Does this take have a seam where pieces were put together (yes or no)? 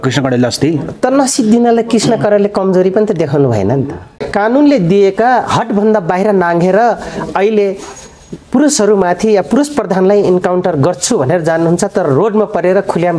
yes